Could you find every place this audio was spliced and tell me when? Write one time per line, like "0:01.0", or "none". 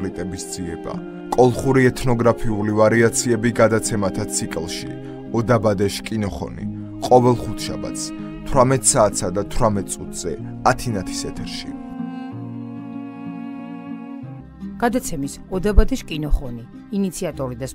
0:14.4

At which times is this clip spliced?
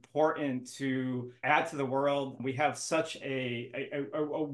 0:01.4
0:02.4

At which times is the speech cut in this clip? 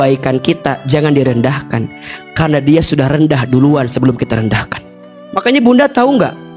0:05.4

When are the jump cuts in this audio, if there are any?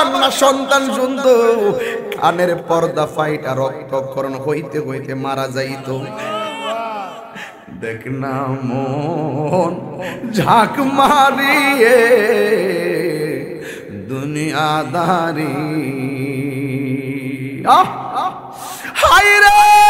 0:06.1

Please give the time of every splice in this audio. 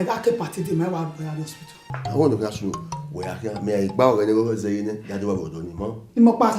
0:01.8

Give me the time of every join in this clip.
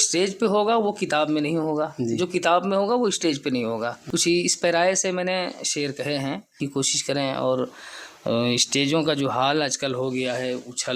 0:04.0
0:06.6

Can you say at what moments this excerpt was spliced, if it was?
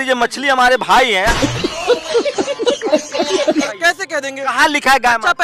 0:01.1
0:03.7

